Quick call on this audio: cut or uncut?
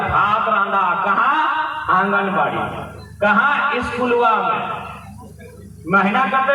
uncut